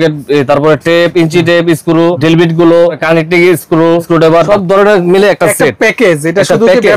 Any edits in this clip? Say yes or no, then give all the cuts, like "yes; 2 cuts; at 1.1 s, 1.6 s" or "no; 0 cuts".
yes; 3 cuts; at 2.2 s, 3.0 s, 4.4 s